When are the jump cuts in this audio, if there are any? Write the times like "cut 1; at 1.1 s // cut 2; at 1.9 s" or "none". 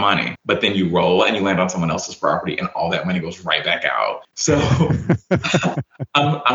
none